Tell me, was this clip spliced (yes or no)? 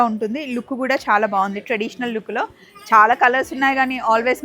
no